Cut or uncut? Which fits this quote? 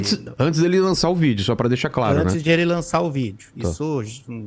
uncut